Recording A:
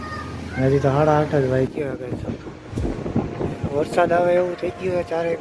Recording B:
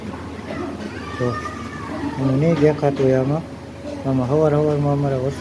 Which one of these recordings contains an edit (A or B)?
A